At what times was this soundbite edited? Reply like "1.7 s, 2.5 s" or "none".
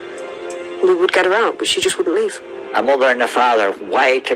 2.5 s